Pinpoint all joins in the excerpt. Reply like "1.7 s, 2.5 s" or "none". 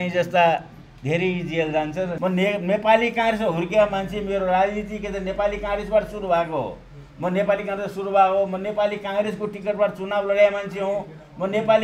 2.1 s